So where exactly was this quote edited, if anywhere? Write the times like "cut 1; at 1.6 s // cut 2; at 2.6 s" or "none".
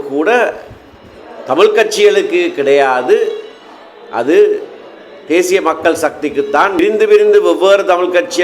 cut 1; at 6.8 s